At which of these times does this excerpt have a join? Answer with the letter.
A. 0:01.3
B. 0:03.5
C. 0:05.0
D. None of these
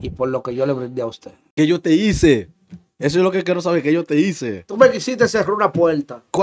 A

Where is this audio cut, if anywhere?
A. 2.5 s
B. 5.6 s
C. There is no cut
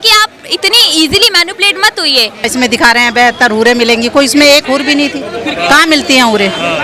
A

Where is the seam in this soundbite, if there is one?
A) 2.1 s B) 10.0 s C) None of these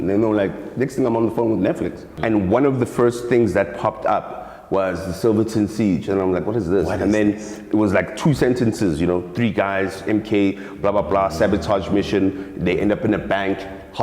A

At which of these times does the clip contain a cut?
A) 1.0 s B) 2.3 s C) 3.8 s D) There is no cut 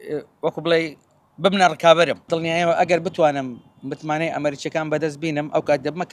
B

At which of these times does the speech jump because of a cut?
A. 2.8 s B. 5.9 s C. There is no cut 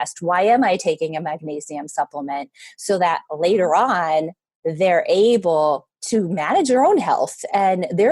B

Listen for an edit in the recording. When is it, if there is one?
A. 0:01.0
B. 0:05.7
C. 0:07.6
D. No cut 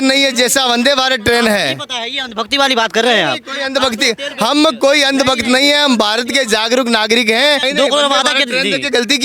C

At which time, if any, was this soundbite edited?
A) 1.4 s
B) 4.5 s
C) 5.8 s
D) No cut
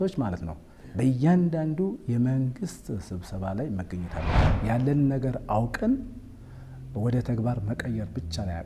B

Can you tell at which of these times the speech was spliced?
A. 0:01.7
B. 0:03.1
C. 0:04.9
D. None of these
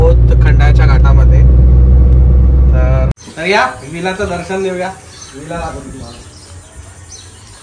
B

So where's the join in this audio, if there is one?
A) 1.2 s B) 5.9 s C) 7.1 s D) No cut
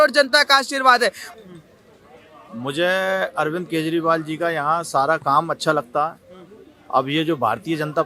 A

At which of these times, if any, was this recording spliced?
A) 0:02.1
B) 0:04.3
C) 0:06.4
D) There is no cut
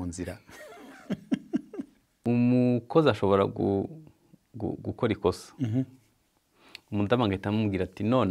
A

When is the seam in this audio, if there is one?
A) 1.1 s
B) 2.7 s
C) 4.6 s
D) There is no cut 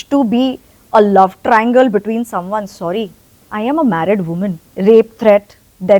C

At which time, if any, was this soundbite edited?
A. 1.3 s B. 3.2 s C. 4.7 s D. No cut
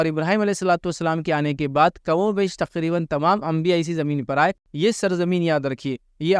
C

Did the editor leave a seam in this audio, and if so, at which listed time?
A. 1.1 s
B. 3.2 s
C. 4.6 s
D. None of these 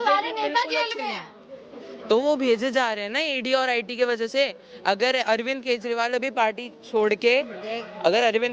D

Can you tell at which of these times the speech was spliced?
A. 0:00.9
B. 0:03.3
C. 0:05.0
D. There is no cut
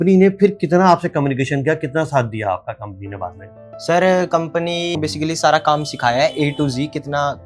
C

